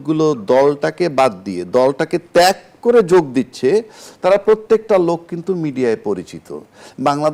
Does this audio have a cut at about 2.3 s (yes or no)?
no